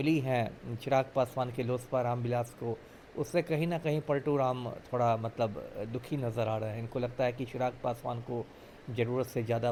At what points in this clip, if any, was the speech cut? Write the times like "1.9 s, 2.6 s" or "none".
none